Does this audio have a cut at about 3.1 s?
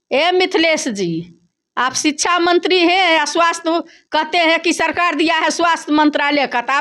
no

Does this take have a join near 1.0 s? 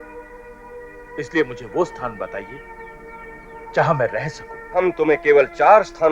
no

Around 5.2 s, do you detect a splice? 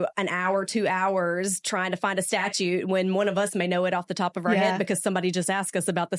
no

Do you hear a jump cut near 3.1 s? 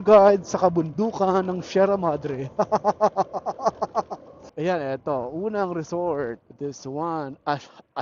no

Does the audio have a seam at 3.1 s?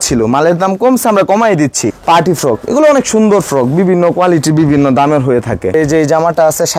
no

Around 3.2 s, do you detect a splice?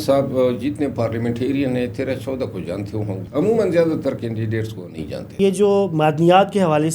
yes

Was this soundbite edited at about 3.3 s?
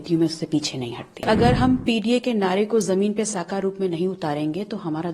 no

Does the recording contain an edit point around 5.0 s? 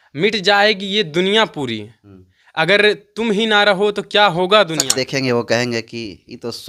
yes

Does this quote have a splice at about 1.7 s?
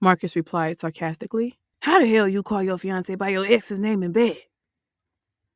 yes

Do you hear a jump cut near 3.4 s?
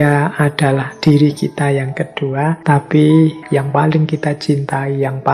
yes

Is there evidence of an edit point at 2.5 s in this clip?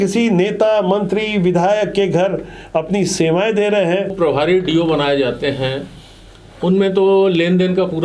no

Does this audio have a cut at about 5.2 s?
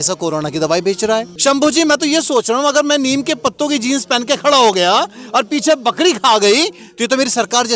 no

